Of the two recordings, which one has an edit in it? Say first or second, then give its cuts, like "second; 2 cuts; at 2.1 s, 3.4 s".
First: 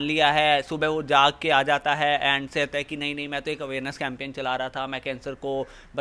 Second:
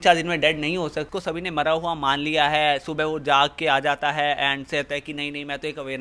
second; 1 cut; at 1.1 s